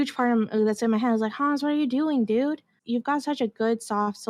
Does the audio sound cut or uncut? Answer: cut